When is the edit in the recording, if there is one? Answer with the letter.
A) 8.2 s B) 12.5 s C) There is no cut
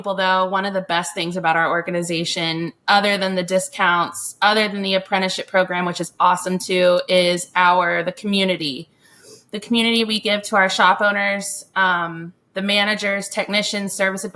C